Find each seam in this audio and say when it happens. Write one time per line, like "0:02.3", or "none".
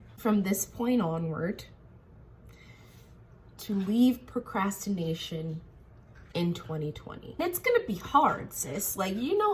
0:07.4